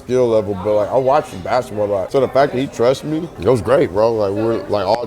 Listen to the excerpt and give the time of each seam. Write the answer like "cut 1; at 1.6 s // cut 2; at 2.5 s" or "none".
cut 1; at 2.1 s // cut 2; at 3.3 s